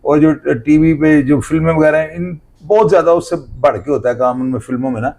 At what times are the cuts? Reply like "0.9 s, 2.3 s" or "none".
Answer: none

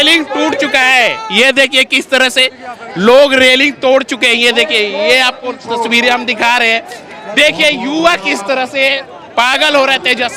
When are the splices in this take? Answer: none

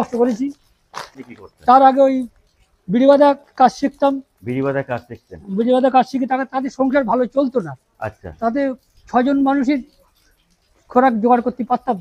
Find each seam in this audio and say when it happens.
1.1 s

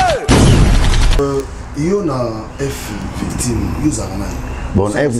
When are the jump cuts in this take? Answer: 1.2 s

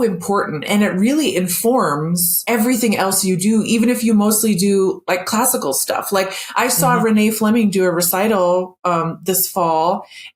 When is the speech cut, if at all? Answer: 2.3 s

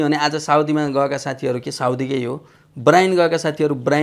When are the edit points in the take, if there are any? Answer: none

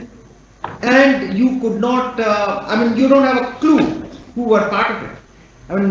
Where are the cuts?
none

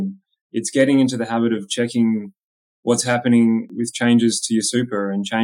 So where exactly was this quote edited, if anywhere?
3.7 s

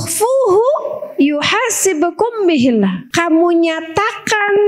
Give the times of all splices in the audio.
3.0 s

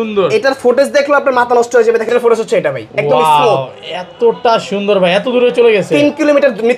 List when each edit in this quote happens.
2.1 s

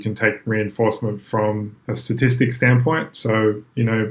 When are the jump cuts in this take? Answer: 1.8 s

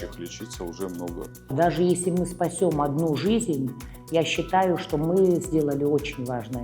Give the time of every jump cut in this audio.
1.5 s

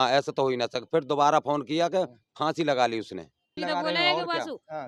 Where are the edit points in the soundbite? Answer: 3.5 s

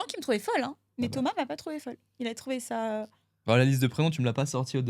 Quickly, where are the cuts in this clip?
none

